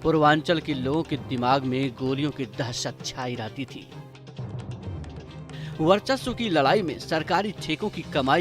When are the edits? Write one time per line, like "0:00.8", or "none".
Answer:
0:03.7
0:05.8